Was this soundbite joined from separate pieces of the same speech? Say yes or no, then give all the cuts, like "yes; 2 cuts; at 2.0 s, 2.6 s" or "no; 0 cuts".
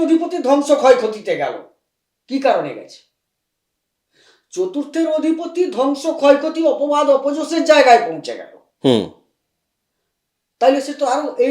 no; 0 cuts